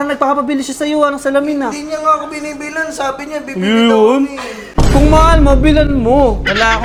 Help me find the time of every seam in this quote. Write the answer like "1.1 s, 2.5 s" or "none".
none